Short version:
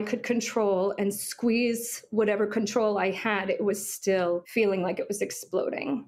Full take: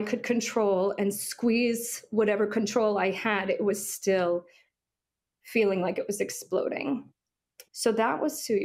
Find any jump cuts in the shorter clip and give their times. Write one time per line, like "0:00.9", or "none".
0:04.5